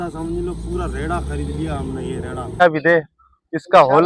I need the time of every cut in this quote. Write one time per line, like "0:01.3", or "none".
0:02.6